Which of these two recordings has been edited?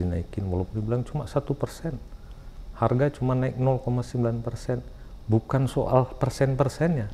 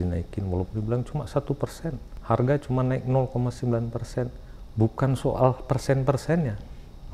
second; 1 cut; at 2.1 s

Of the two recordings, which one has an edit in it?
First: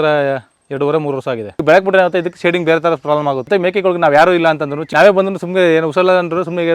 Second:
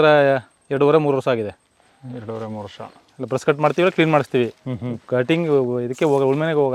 first; 3 cuts; at 1.5 s, 3.5 s, 4.8 s

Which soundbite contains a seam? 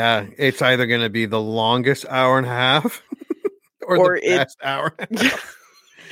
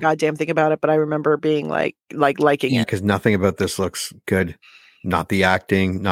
second; 1 cut; at 2.8 s

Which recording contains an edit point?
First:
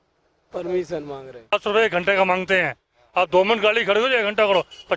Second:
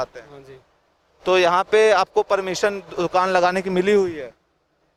first; 1 cut; at 1.5 s

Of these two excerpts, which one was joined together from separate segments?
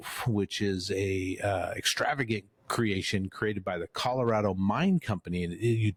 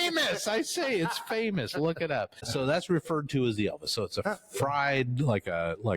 second; 1 cut; at 2.5 s

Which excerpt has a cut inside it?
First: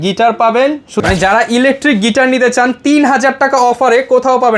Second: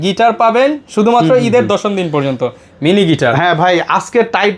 first; 1 cut; at 1.0 s

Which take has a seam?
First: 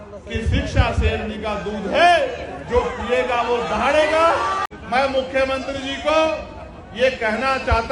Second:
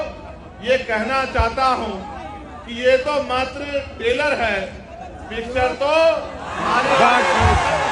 first; 1 cut; at 4.7 s

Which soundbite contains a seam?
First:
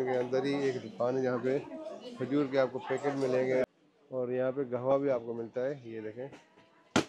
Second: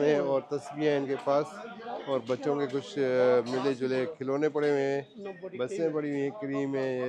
first; 1 cut; at 3.6 s

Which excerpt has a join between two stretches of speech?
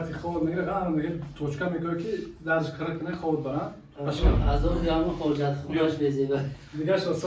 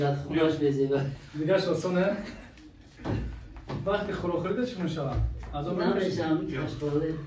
first; 1 cut; at 3.8 s

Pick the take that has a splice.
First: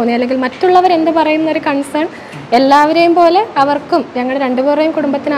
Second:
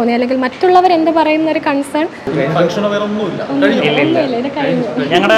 second; 1 cut; at 2.2 s

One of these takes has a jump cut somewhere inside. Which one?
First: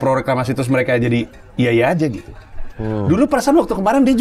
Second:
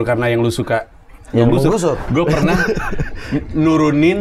second; 1 cut; at 2.0 s

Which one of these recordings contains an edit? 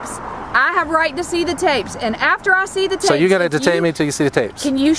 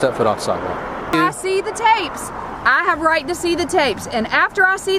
second; 1 cut; at 1.1 s

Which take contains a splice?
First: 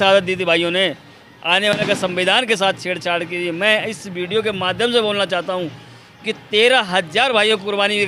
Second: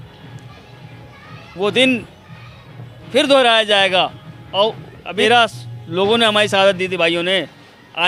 second; 1 cut; at 5.1 s

